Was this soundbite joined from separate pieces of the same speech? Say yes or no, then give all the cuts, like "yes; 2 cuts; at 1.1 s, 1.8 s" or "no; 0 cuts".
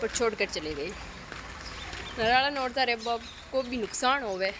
no; 0 cuts